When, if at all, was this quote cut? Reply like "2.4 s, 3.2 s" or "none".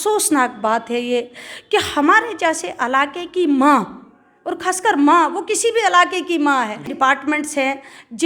6.9 s